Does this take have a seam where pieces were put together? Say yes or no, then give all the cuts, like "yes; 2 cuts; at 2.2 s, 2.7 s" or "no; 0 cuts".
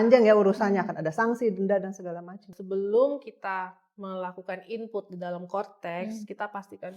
yes; 1 cut; at 2.5 s